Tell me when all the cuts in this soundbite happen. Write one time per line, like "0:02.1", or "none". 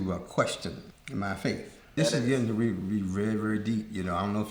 0:00.9
0:01.9